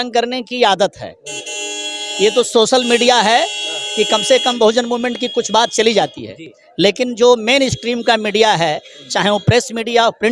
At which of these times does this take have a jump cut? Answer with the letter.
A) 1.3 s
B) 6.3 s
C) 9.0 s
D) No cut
D